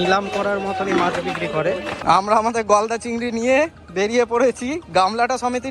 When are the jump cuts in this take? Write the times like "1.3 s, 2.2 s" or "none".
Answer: 1.9 s, 3.8 s